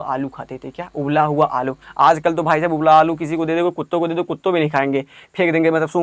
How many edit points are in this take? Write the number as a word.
zero